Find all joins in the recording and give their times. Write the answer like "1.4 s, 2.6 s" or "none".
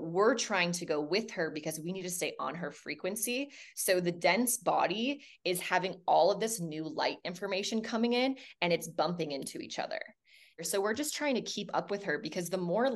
10.6 s